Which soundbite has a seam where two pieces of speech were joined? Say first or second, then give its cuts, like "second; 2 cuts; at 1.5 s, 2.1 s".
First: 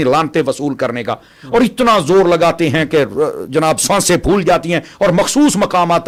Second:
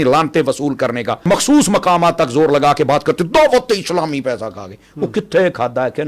second; 1 cut; at 1.3 s